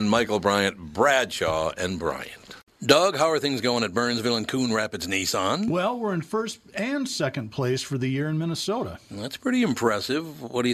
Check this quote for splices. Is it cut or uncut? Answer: cut